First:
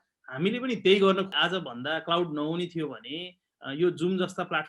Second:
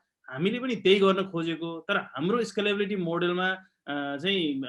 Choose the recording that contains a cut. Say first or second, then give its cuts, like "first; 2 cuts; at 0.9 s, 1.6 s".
first; 1 cut; at 1.3 s